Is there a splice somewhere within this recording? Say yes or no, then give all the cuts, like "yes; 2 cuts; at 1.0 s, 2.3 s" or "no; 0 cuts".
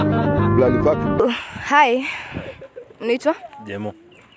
yes; 1 cut; at 1.2 s